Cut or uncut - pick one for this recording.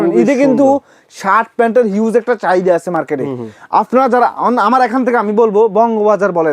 uncut